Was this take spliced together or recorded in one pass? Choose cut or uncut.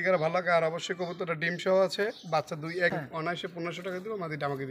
cut